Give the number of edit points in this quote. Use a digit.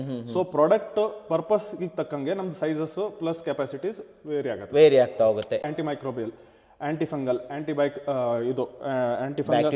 1